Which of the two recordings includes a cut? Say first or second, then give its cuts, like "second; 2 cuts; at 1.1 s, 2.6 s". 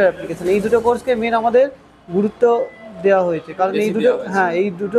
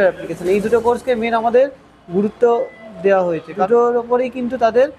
second; 1 cut; at 3.6 s